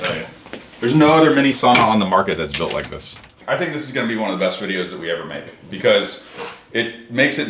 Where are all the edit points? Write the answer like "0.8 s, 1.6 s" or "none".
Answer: 3.3 s